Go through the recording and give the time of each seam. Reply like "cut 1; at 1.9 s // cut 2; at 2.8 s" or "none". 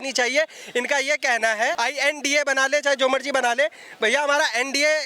cut 1; at 1.8 s